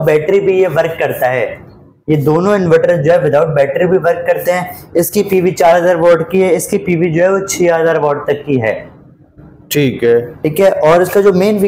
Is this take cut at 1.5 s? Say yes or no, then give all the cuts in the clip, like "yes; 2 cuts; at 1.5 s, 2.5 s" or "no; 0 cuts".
no; 0 cuts